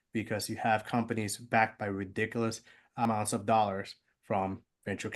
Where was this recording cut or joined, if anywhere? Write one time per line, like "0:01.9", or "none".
0:03.1